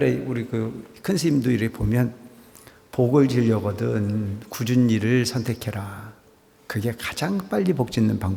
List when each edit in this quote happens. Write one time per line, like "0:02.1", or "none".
none